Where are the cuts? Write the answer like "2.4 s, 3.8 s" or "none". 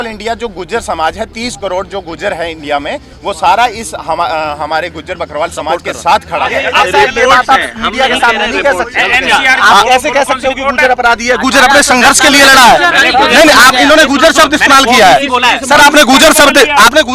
6.6 s